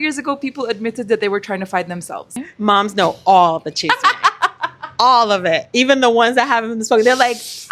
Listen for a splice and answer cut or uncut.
cut